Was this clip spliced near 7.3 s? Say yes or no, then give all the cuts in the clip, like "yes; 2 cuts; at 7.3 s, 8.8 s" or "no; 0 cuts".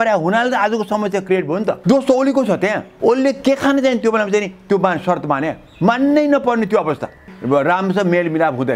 yes; 3 cuts; at 1.8 s, 2.9 s, 7.3 s